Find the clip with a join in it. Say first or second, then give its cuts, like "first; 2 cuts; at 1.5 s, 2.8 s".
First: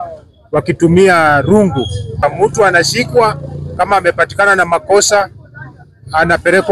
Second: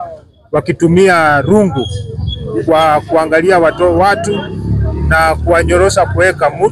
first; 1 cut; at 2.2 s